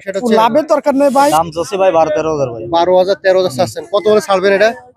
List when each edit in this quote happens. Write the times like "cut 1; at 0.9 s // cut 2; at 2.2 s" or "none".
cut 1; at 1.3 s